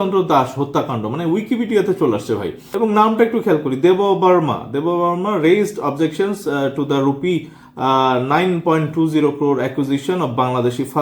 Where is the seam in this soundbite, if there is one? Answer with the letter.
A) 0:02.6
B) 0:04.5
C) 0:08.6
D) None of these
A